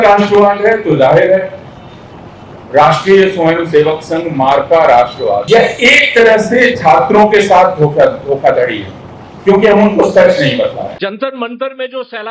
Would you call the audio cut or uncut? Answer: cut